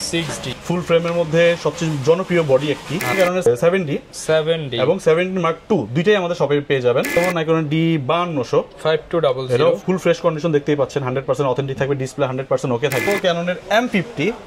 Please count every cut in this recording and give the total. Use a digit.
3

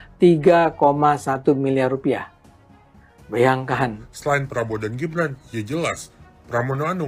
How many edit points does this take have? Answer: 1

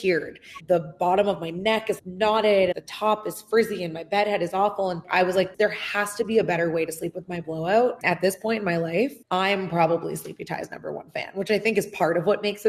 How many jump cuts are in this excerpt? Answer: 2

